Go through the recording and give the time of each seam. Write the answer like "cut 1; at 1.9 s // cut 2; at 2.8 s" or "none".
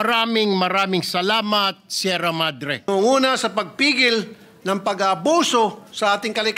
cut 1; at 2.9 s